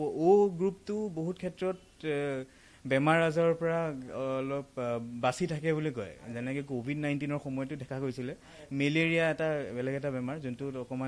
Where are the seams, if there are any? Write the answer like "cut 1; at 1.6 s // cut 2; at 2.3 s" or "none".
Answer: none